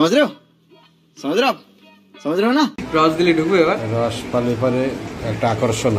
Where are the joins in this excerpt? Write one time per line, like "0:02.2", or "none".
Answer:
0:02.8